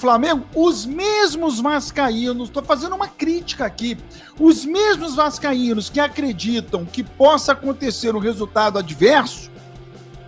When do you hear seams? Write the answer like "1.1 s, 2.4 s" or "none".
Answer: none